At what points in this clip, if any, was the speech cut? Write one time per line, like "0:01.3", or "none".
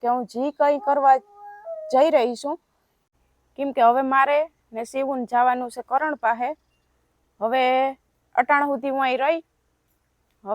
0:03.0

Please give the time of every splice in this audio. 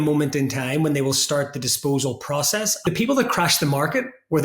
0:02.8

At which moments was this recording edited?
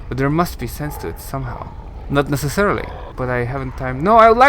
0:03.0

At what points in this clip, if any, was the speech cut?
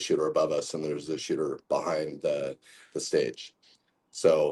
none

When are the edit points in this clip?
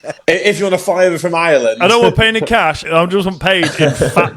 0:02.8

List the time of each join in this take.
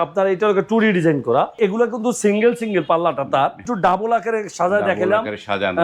0:01.6
0:03.7

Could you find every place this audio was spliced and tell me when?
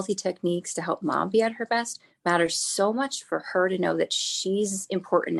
none

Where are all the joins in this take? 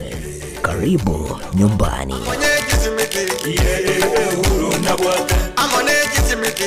0:02.2

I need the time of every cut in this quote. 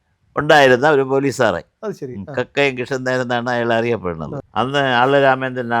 0:04.4

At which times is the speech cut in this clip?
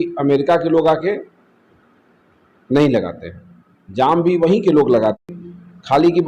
0:05.4

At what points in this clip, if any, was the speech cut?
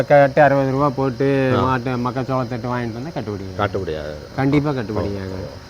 none

